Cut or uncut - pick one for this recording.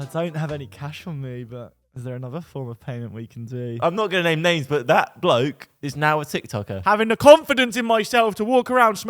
cut